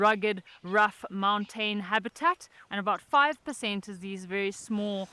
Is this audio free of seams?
no; 1 cut; at 2.6 s

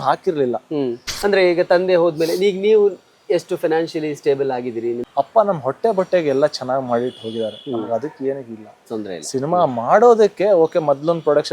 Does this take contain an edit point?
yes; 2 cuts; at 1.0 s, 5.0 s

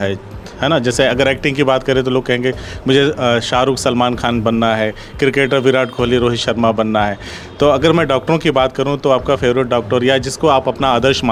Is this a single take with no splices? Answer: yes; 0 cuts

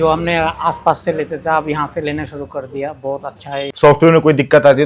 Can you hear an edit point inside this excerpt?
yes; 1 cut; at 3.6 s

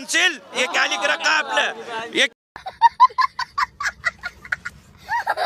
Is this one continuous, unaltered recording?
yes; 0 cuts

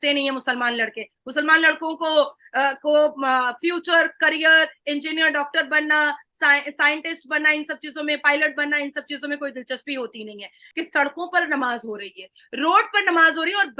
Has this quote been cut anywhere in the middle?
yes; 1 cut; at 10.6 s

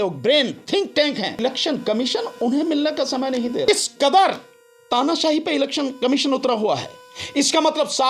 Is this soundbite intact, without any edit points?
no; 2 cuts; at 1.4 s, 3.7 s

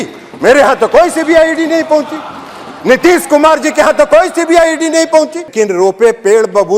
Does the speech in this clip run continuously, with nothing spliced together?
no; 1 cut; at 5.5 s

